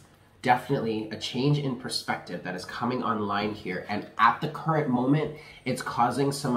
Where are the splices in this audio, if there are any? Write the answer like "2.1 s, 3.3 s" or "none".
none